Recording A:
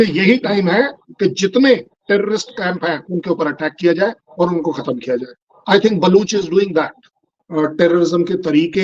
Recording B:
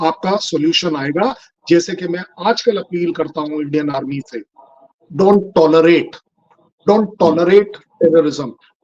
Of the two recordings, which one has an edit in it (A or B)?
A